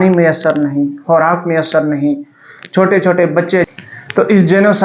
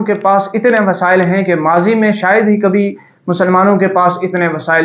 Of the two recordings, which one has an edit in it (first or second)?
first